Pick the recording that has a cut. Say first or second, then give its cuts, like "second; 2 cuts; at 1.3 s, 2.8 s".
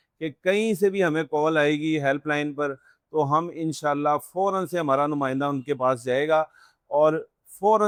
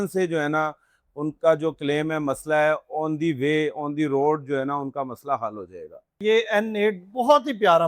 second; 1 cut; at 6.2 s